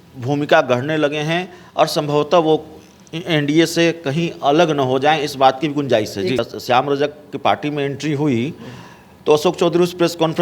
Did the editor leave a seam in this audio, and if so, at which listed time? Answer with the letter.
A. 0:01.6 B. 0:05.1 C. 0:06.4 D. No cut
C